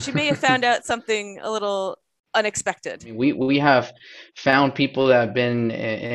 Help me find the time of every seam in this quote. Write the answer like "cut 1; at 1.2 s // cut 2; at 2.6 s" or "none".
cut 1; at 2.1 s // cut 2; at 3.1 s